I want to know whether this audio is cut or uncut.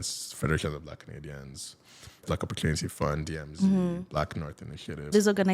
cut